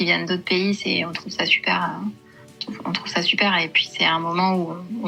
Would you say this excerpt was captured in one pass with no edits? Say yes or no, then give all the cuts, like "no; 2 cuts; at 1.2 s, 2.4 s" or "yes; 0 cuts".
yes; 0 cuts